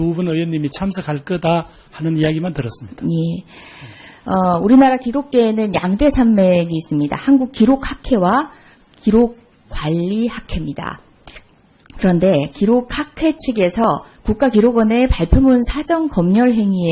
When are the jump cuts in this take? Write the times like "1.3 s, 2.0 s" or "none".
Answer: 7.2 s